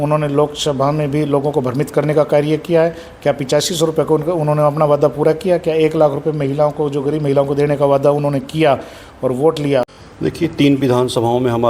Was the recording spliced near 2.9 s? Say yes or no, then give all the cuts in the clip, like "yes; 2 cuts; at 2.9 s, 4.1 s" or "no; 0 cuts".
no; 1 cut; at 9.9 s